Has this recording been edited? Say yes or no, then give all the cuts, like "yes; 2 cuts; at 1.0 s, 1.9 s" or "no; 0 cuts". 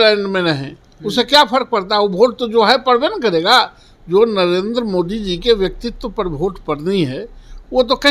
no; 0 cuts